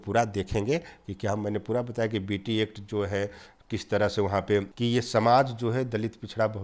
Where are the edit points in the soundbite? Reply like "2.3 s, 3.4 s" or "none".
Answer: 4.7 s